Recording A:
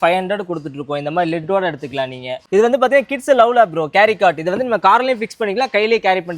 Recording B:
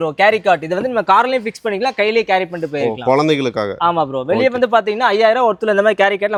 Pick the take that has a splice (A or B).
A